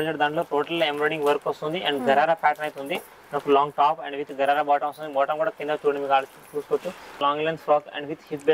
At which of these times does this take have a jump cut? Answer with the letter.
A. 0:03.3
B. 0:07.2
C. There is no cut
B